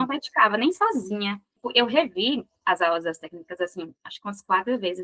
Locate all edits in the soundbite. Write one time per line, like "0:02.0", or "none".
0:01.6